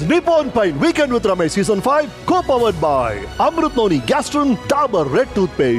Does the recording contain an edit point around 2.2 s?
yes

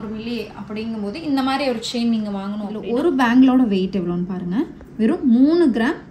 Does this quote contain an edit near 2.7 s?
yes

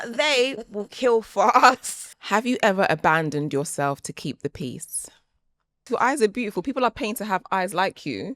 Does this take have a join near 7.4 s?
no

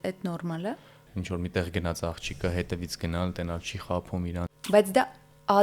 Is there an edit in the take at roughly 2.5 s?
no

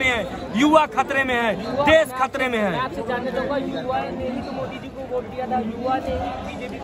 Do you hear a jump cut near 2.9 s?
no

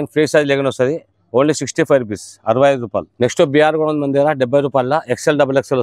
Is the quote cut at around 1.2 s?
no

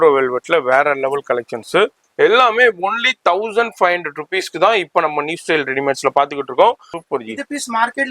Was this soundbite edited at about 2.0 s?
yes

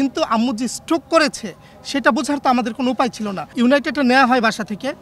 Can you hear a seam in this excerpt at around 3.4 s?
yes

